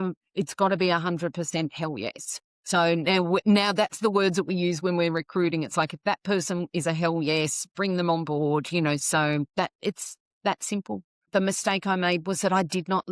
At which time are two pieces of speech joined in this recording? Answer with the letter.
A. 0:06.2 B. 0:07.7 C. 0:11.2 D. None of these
C